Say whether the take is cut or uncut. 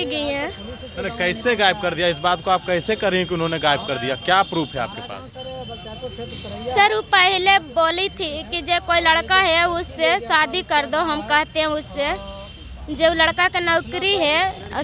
uncut